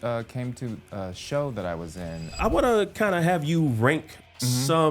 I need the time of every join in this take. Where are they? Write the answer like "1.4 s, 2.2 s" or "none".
2.4 s